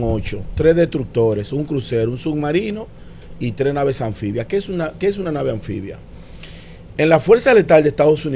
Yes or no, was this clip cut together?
no